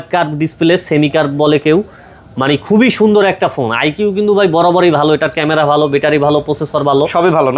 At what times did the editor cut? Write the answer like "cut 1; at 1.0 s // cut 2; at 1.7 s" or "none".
none